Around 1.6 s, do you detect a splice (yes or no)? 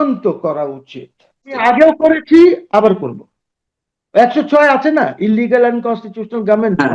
yes